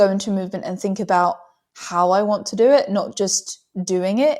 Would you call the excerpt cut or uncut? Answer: uncut